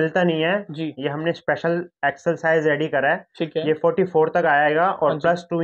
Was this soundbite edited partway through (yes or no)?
no